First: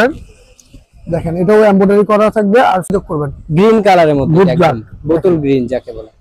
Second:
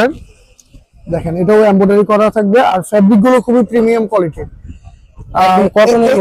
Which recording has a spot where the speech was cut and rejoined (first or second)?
first